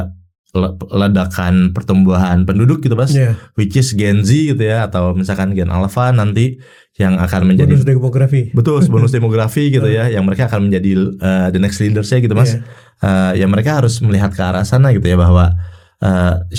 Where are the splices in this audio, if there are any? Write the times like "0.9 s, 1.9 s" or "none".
none